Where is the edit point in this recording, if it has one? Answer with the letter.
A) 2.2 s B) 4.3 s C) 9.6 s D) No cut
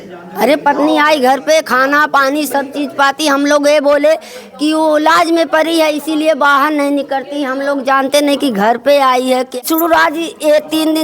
C